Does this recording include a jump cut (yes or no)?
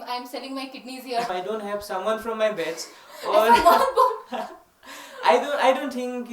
yes